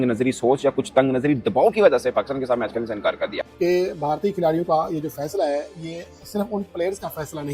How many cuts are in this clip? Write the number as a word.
one